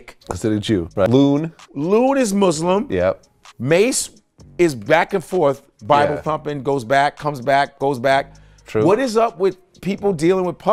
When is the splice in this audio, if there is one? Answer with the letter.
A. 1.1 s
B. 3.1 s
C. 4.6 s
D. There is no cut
A